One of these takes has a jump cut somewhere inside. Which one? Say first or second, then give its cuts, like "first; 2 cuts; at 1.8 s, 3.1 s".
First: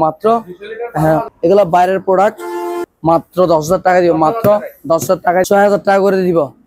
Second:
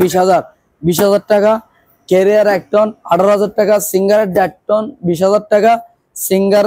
first; 3 cuts; at 1.3 s, 2.8 s, 5.5 s